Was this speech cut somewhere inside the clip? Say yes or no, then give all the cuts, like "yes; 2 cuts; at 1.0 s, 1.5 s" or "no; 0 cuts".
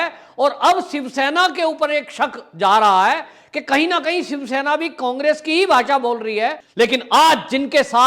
yes; 1 cut; at 6.6 s